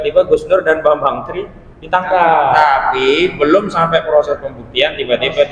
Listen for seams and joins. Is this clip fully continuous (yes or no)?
no